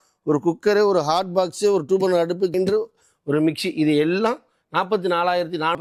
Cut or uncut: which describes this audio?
uncut